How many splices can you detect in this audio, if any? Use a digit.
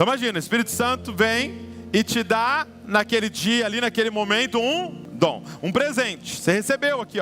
1